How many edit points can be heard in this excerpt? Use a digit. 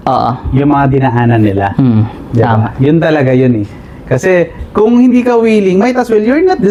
0